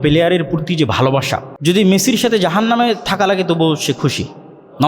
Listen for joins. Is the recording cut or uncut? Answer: cut